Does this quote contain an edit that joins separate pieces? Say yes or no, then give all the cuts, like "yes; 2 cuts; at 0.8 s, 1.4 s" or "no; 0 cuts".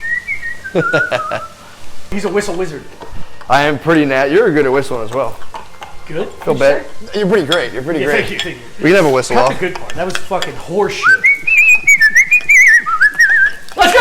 yes; 1 cut; at 2.1 s